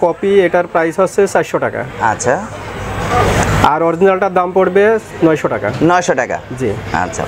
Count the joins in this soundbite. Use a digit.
0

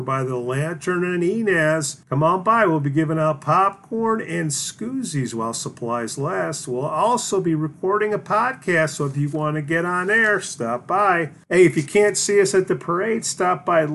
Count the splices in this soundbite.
2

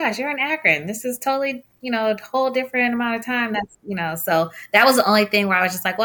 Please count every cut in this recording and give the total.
0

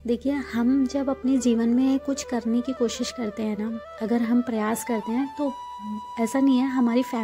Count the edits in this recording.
0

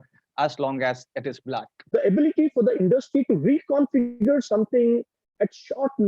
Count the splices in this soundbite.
1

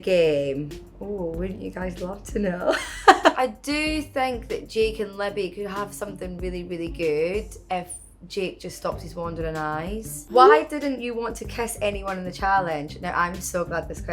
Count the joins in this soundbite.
2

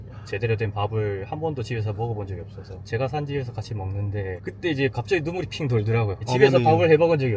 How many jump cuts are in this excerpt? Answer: 2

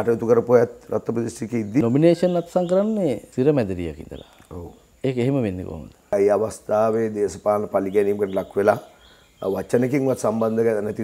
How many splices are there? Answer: 3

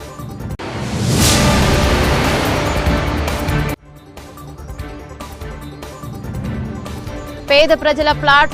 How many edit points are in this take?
1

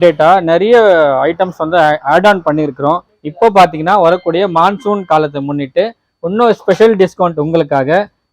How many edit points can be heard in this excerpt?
1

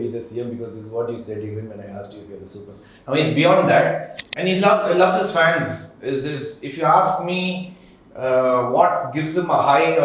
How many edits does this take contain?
1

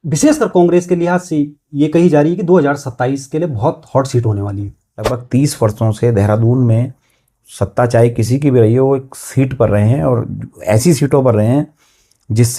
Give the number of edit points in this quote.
1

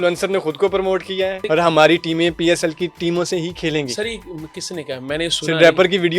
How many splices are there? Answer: 1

